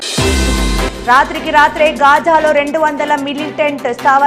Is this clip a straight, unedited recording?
yes; 0 cuts

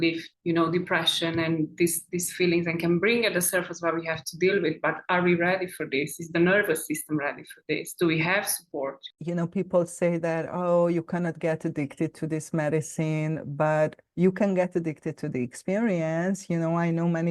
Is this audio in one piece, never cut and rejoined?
no; 1 cut; at 9.1 s

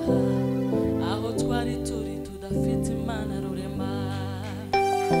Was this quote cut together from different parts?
no; 0 cuts

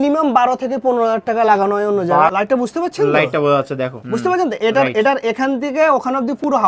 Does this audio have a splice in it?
yes; 1 cut; at 2.3 s

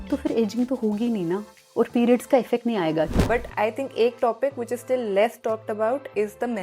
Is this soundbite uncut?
no; 2 cuts; at 1.6 s, 3.1 s

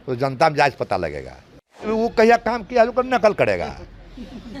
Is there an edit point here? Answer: yes; 1 cut; at 1.9 s

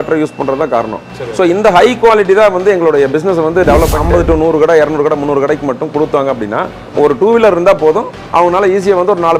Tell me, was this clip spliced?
yes; 2 cuts; at 4.0 s, 6.9 s

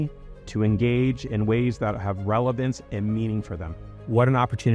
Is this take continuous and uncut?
no; 1 cut; at 3.8 s

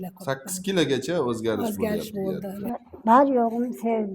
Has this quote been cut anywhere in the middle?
yes; 1 cut; at 2.5 s

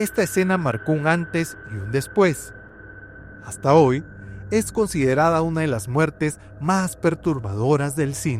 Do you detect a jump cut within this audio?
no; 0 cuts

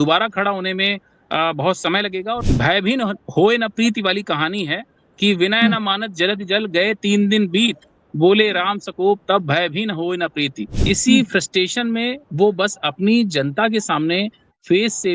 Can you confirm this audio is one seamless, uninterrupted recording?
no; 2 cuts; at 2.4 s, 10.7 s

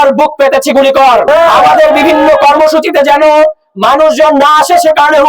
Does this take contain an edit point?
yes; 1 cut; at 1.2 s

